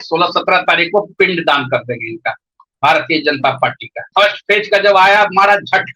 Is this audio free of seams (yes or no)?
no